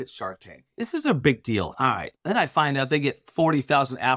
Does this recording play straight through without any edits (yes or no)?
no